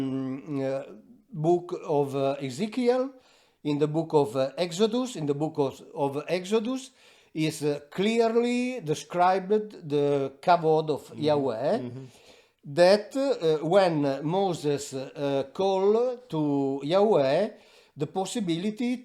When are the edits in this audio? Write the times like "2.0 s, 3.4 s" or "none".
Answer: none

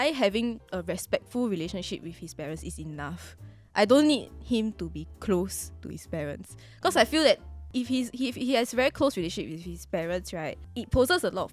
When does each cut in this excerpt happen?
7.5 s, 10.6 s

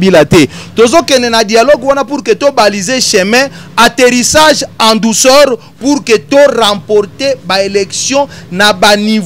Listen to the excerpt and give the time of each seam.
none

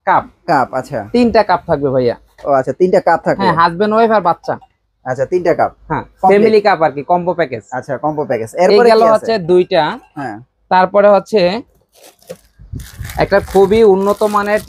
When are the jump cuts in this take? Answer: none

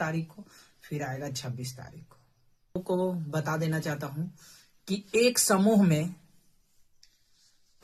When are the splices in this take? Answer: 2.8 s

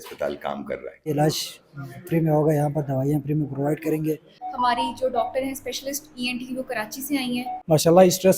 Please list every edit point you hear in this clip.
1.1 s, 4.4 s, 7.5 s

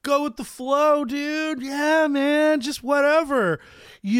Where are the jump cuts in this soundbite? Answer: none

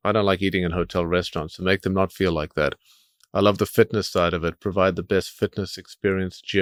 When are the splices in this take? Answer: none

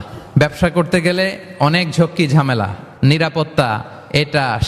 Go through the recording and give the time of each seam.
none

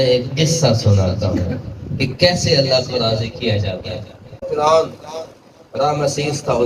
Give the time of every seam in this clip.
4.3 s

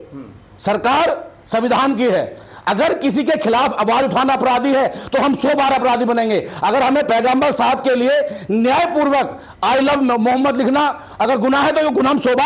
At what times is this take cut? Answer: 2.4 s

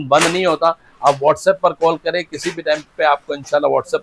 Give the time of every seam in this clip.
none

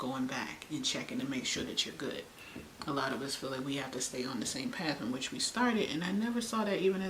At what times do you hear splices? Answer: none

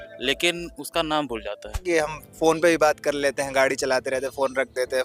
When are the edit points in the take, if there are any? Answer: 1.8 s

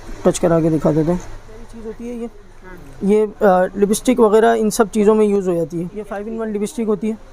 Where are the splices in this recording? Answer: 1.7 s, 6.1 s

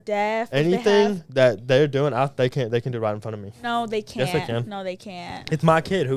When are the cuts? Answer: none

